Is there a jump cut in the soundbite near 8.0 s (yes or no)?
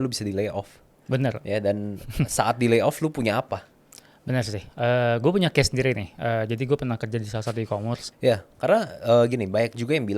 yes